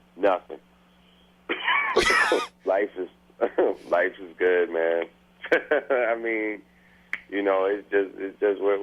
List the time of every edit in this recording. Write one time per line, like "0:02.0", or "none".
none